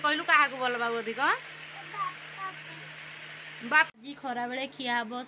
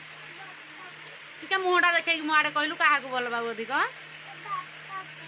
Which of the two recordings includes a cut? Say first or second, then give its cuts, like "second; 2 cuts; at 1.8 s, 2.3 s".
first; 1 cut; at 3.9 s